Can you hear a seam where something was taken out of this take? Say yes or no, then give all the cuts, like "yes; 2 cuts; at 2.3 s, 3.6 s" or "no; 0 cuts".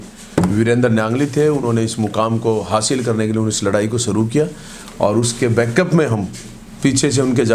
no; 0 cuts